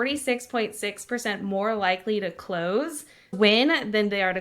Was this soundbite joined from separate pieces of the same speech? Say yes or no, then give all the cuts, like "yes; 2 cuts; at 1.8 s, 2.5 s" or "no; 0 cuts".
yes; 1 cut; at 3.3 s